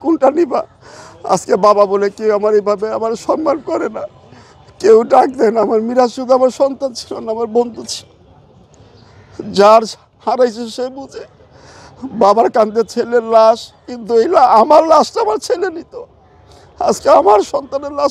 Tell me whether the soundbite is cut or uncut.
uncut